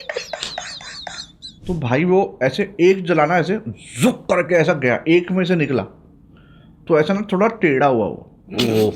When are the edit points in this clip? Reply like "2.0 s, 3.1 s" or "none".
1.5 s